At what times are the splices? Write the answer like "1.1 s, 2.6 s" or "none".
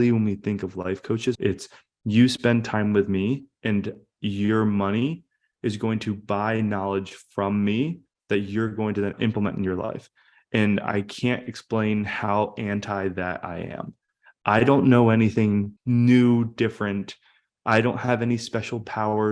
1.4 s, 9.1 s, 15.7 s